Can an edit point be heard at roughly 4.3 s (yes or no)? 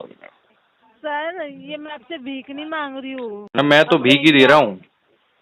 no